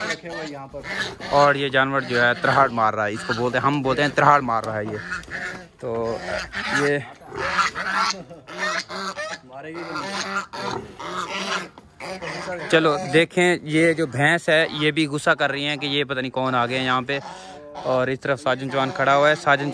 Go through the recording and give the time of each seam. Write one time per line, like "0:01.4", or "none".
none